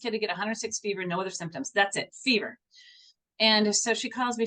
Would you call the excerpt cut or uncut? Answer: uncut